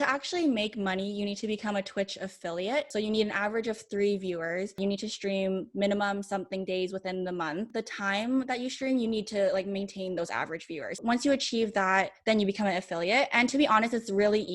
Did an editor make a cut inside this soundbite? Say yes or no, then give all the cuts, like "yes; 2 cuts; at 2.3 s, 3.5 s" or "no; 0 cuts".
yes; 4 cuts; at 2.9 s, 4.8 s, 7.7 s, 11.0 s